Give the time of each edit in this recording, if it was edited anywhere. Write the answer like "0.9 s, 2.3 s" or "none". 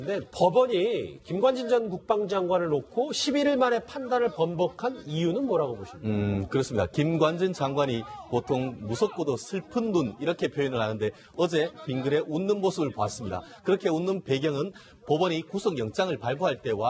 11.2 s